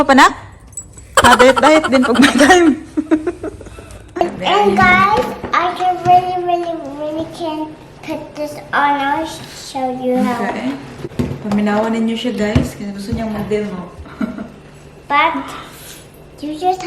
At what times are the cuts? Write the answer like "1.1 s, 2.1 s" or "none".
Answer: 4.0 s, 11.0 s

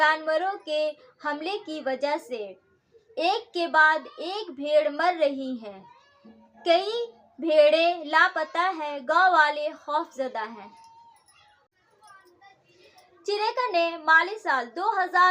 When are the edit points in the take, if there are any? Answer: 11.7 s

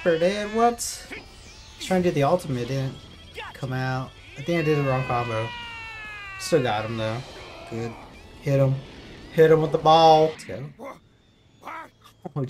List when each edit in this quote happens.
10.4 s

